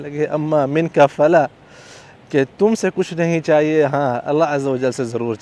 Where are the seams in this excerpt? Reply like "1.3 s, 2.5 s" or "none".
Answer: none

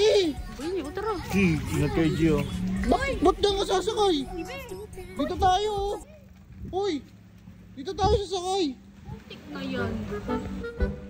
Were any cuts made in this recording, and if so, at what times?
none

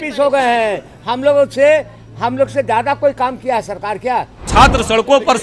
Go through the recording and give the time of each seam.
4.5 s

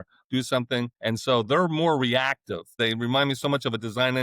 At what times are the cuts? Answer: 0.9 s, 2.8 s

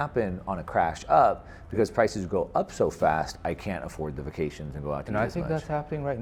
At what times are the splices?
none

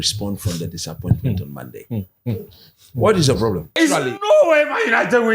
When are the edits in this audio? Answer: 3.8 s

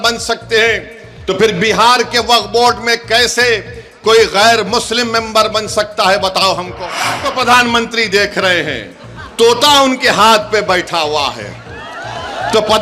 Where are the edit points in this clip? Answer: 7.3 s

